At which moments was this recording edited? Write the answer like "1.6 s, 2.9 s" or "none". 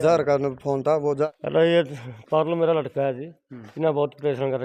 none